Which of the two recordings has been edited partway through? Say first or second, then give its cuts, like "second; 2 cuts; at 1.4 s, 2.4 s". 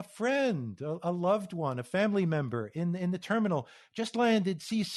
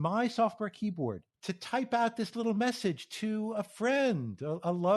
second; 1 cut; at 1.3 s